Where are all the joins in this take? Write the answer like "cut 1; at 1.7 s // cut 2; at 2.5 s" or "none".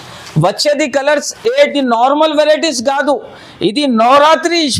cut 1; at 1.7 s